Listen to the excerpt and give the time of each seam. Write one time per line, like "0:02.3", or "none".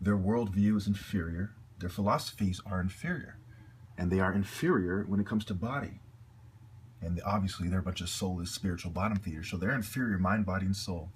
0:02.1